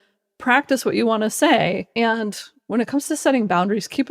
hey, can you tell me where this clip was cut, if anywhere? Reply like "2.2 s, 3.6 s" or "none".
1.9 s